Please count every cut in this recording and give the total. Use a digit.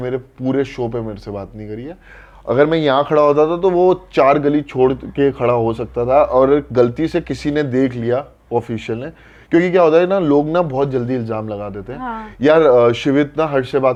0